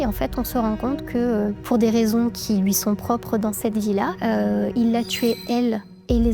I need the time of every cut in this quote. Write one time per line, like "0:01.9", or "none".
none